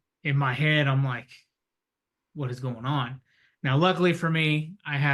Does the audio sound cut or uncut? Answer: uncut